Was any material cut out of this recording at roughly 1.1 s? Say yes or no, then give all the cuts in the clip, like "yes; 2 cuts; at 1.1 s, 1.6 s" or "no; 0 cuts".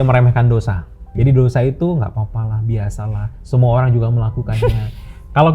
yes; 1 cut; at 1.1 s